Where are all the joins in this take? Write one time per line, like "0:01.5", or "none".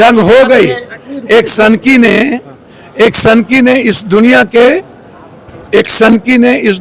none